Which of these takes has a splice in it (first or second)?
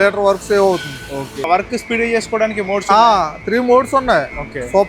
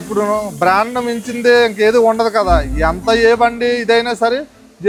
first